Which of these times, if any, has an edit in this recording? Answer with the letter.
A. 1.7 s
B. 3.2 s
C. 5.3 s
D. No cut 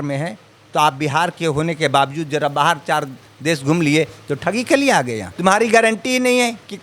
C